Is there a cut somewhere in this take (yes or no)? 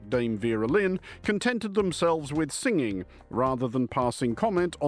yes